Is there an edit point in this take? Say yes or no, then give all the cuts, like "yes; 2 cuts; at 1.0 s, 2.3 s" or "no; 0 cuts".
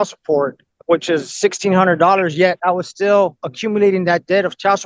no; 0 cuts